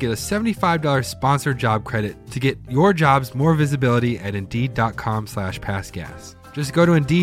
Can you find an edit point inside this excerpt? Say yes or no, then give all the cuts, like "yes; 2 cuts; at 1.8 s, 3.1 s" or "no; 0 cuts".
no; 0 cuts